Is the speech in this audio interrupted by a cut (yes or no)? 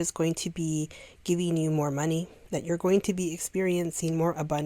yes